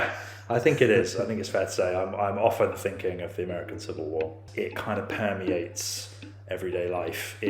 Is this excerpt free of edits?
no; 1 cut; at 4.4 s

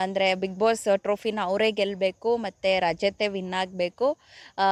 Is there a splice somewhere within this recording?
no; 0 cuts

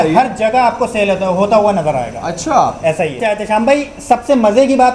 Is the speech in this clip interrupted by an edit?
no; 0 cuts

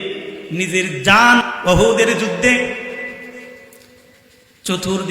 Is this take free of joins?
no; 1 cut; at 1.4 s

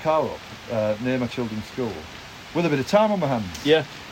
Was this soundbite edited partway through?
no; 0 cuts

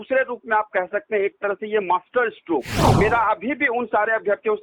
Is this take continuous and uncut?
no; 1 cut; at 2.8 s

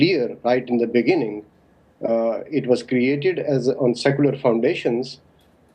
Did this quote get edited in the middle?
yes; 1 cut; at 0.9 s

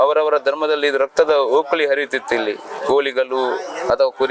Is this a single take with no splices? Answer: yes; 0 cuts

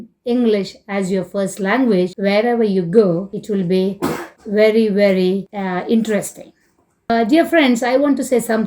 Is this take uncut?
no; 5 cuts; at 2.1 s, 3.3 s, 4.3 s, 5.5 s, 7.1 s

